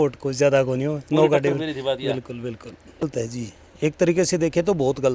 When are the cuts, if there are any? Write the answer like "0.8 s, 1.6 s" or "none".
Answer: 3.0 s